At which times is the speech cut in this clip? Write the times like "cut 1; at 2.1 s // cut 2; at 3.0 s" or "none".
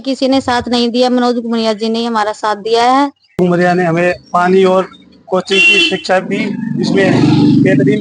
cut 1; at 3.3 s